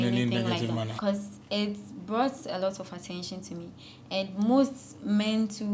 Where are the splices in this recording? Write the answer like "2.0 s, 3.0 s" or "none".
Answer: 0.9 s